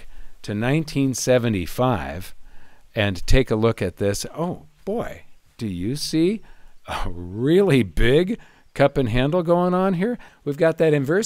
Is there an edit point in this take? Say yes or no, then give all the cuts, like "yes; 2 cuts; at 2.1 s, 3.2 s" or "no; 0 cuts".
yes; 1 cut; at 10.3 s